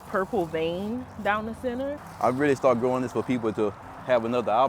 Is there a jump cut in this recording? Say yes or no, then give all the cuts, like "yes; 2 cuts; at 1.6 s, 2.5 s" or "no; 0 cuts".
yes; 1 cut; at 2.0 s